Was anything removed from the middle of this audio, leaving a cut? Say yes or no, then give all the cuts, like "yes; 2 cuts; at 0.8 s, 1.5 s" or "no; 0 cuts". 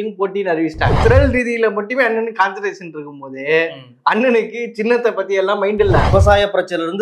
yes; 2 cuts; at 1.0 s, 6.1 s